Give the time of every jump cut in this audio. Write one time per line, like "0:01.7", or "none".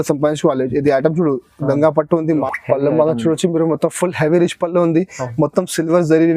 0:02.4